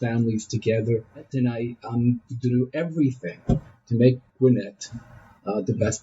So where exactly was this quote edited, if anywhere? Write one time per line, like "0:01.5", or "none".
0:01.2
0:04.3